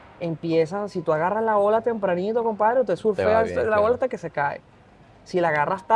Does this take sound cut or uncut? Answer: uncut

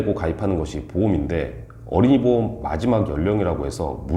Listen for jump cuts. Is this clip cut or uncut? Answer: uncut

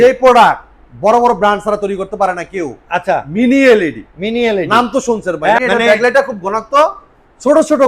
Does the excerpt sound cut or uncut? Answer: cut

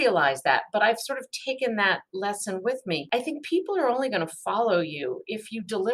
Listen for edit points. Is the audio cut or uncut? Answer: cut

